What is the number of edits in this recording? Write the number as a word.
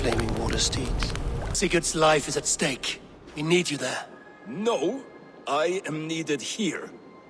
one